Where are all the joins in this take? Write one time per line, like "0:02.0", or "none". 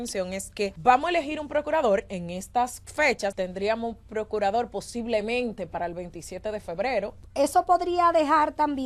0:00.8
0:03.3
0:07.2